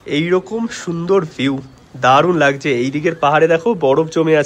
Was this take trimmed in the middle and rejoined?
no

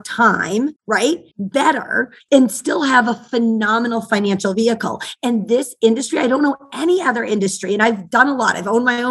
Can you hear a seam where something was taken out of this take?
yes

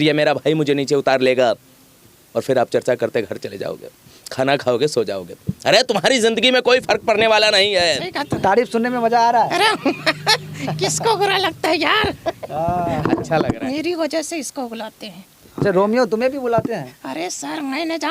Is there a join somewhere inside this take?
yes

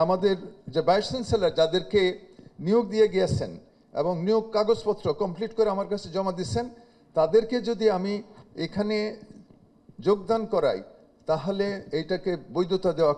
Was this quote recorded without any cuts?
yes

